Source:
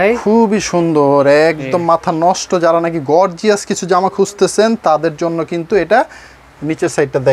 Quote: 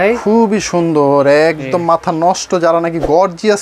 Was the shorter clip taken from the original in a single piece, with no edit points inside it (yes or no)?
yes